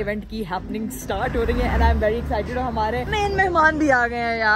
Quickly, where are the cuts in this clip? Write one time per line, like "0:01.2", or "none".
none